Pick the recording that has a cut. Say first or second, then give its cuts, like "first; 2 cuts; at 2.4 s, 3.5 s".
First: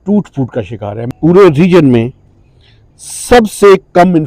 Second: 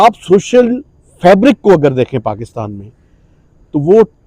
first; 1 cut; at 1.0 s